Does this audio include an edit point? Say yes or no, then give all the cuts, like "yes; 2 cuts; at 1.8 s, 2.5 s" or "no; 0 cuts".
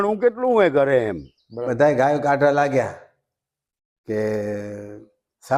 yes; 1 cut; at 1.7 s